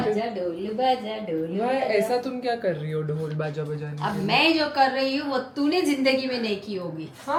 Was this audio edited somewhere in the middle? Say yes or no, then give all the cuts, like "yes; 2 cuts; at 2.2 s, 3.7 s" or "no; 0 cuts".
no; 0 cuts